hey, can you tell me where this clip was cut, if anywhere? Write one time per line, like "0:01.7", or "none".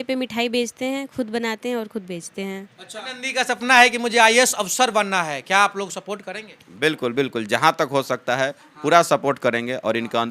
0:03.0